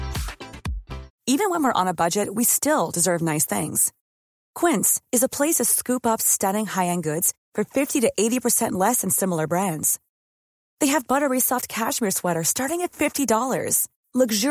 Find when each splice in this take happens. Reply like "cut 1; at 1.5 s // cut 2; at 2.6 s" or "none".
cut 1; at 1.1 s